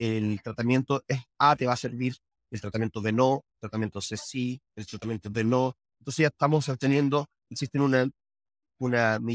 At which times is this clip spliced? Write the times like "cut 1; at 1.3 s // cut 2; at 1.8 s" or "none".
cut 1; at 7.5 s